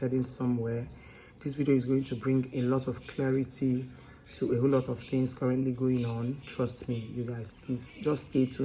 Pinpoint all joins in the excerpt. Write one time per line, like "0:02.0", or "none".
none